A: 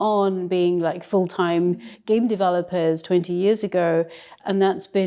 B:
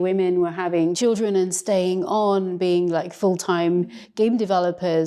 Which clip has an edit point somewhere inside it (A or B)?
B